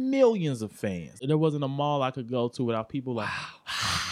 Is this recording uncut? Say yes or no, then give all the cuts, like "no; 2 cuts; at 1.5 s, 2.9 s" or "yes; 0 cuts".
no; 1 cut; at 1.1 s